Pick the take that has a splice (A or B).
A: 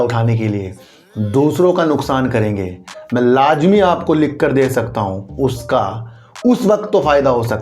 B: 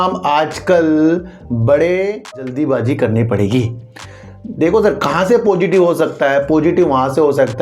B